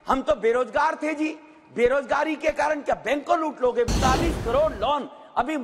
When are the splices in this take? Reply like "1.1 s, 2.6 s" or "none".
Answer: 3.9 s

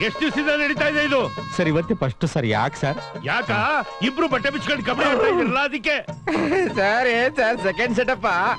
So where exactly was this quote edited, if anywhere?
none

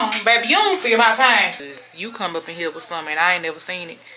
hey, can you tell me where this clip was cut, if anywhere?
1.6 s

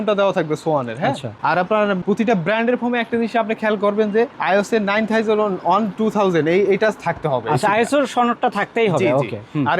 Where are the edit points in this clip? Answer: none

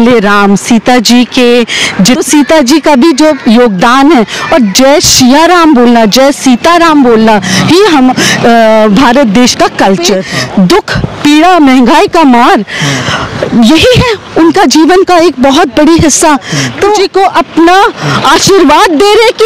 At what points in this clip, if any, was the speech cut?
2.2 s, 10.3 s, 17.0 s

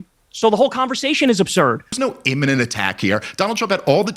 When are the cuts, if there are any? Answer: 2.0 s

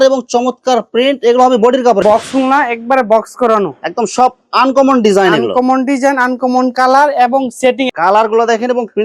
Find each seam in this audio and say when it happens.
2.0 s, 7.9 s

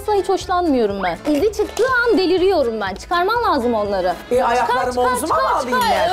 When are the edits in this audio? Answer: 1.2 s

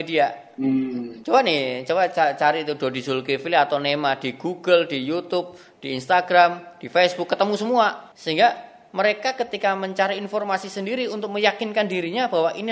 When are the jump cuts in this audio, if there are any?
1.1 s, 8.1 s

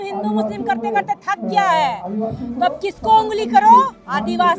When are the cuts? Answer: none

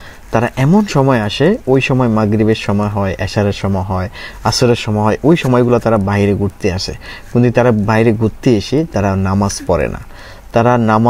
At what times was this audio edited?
none

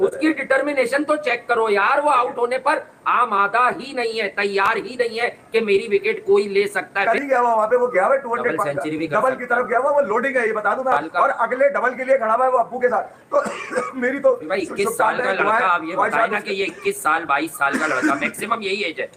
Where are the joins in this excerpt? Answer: none

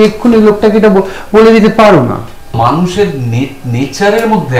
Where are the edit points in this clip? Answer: 2.5 s

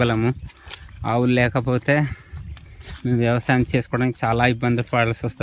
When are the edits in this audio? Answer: none

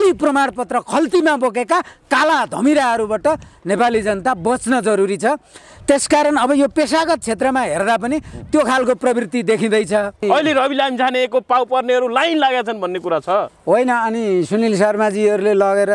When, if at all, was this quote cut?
10.2 s

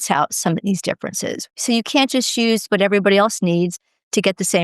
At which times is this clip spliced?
1.5 s, 2.7 s

